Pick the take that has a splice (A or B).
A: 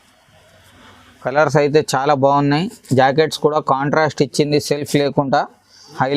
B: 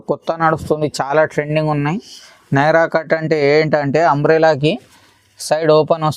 A